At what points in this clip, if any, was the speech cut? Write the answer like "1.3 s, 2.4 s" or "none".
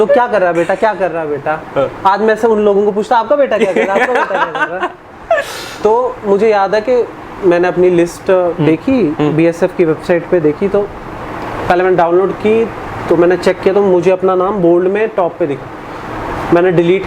none